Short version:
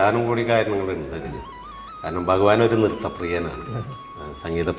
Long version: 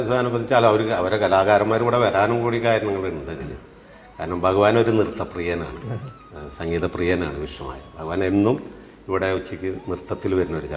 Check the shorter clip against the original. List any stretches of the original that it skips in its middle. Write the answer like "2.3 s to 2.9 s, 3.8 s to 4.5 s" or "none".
none